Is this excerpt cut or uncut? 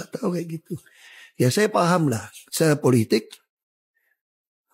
uncut